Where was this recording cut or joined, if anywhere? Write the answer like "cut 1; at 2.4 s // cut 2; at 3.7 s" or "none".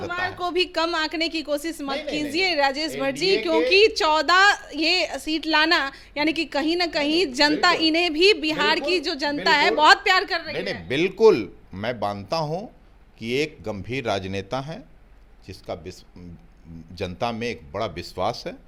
none